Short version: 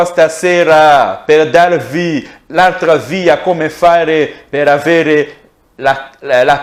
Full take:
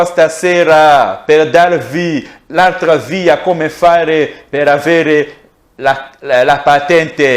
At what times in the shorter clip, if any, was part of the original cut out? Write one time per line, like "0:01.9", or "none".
none